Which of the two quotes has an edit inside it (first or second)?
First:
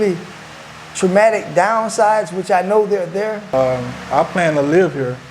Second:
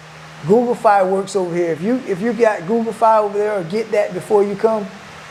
first